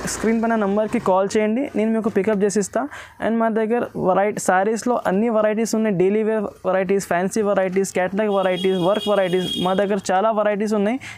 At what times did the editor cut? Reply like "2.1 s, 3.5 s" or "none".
none